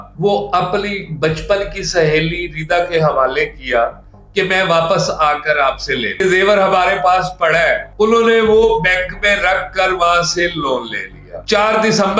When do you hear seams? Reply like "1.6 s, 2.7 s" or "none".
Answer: 6.1 s, 11.4 s